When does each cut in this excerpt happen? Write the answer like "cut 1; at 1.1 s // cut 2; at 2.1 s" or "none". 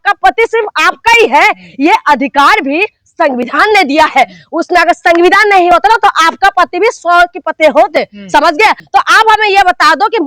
cut 1; at 8.8 s